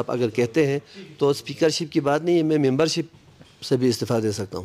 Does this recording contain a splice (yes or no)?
no